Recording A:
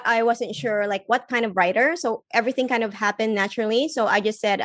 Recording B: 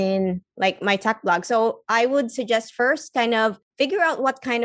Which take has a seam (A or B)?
B